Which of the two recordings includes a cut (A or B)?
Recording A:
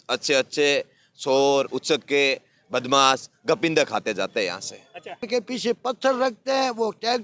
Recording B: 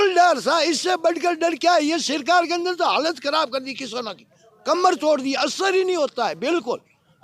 A